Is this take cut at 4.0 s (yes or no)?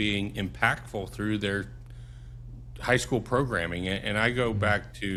no